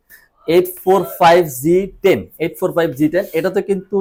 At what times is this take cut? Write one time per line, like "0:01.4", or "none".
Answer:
none